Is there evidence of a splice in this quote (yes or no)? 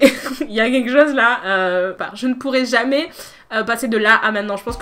yes